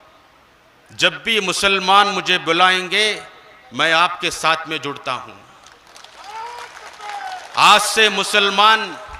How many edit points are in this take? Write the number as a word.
zero